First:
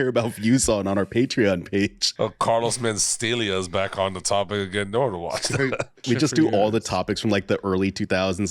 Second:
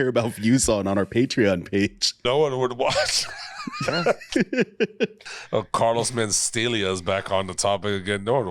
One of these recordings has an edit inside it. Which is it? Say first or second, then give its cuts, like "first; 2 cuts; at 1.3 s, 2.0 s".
first; 2 cuts; at 2.0 s, 6.0 s